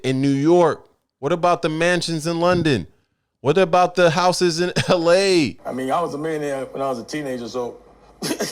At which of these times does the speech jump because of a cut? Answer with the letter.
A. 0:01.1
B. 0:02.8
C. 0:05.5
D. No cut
C